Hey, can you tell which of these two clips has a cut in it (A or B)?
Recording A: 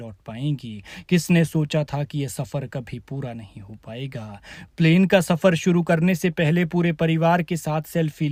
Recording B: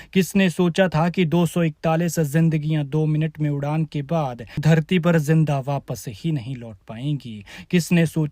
B